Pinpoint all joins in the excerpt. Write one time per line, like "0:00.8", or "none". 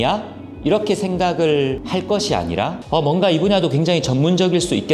0:01.8
0:02.8